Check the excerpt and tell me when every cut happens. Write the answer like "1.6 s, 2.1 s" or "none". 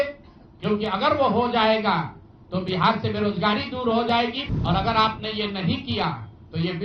4.4 s